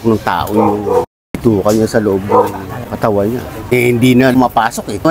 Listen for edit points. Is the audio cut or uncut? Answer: uncut